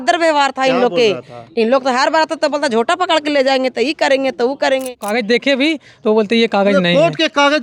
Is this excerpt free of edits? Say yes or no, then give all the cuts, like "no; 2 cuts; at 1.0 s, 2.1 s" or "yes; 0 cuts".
no; 1 cut; at 5.0 s